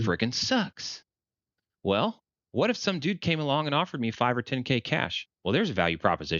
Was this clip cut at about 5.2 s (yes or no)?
yes